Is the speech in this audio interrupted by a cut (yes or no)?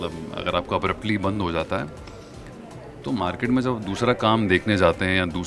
no